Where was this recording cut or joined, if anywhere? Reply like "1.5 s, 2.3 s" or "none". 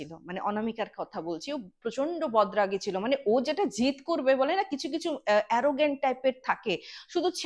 none